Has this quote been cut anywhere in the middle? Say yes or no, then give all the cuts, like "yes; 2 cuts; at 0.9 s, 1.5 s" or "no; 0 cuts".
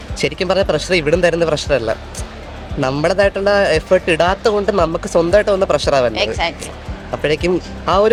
no; 0 cuts